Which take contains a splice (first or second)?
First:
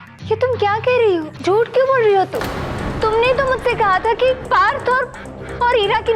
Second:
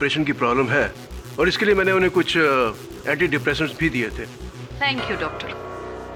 first